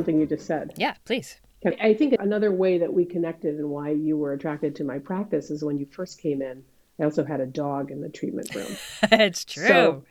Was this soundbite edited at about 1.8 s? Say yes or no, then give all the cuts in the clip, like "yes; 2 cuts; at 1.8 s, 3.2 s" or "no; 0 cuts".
no; 0 cuts